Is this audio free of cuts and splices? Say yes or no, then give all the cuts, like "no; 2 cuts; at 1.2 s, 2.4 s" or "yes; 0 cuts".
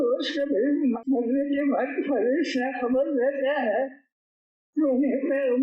no; 1 cut; at 1.0 s